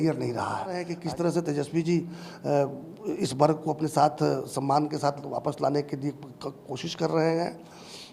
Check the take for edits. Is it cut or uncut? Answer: cut